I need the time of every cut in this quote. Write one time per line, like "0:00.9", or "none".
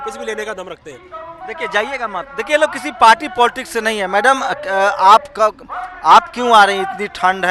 none